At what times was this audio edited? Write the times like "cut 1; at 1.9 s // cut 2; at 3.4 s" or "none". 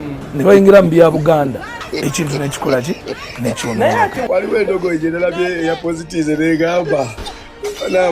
cut 1; at 1.8 s // cut 2; at 4.3 s